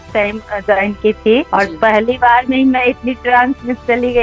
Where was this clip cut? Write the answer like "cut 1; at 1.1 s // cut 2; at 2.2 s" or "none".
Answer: cut 1; at 1.5 s